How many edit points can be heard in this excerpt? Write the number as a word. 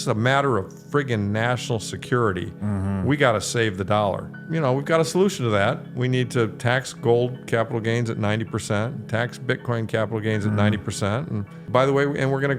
two